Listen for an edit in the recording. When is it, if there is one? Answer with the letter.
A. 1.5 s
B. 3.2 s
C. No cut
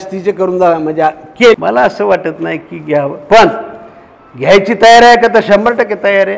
A